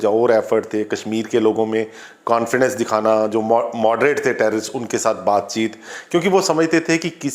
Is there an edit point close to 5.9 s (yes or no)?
no